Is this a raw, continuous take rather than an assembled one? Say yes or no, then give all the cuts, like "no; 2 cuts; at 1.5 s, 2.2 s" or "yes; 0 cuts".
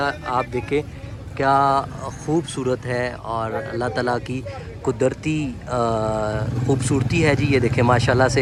yes; 0 cuts